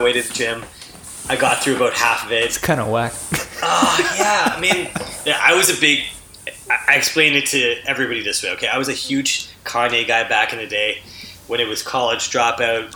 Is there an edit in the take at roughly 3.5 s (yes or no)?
no